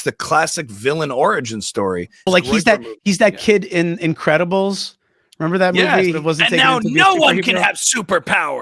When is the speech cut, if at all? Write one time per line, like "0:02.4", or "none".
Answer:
0:02.3
0:06.2